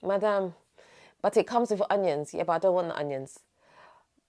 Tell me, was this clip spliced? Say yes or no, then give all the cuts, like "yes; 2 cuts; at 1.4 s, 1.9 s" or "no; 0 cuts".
no; 0 cuts